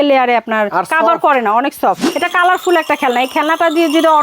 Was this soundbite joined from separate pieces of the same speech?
yes; 1 cut; at 2.1 s

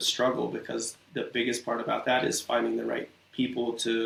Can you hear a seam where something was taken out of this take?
no; 0 cuts

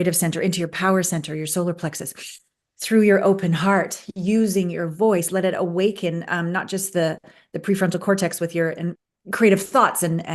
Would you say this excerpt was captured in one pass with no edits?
no; 1 cut; at 9.0 s

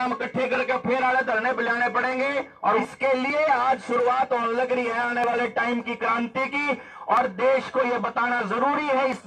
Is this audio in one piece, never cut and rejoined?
no; 1 cut; at 2.8 s

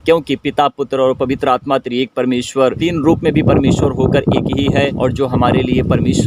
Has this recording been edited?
yes; 2 cuts; at 2.8 s, 4.9 s

